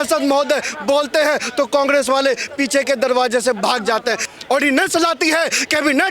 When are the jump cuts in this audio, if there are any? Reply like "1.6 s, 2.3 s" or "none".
4.3 s